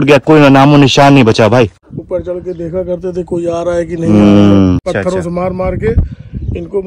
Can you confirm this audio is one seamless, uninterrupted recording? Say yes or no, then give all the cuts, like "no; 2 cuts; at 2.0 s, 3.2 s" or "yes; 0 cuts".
no; 2 cuts; at 1.9 s, 4.8 s